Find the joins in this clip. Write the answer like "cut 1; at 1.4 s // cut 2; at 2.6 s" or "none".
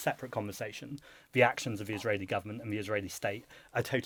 none